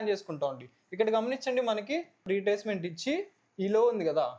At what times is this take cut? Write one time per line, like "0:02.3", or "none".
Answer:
0:02.2